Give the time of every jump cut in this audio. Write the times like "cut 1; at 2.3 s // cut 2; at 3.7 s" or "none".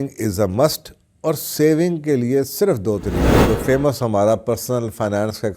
cut 1; at 3.3 s